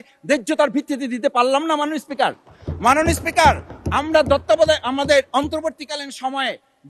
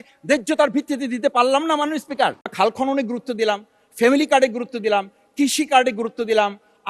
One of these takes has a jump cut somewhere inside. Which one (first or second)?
second